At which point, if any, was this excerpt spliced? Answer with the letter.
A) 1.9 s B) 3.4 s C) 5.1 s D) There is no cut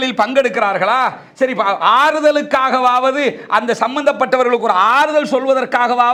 D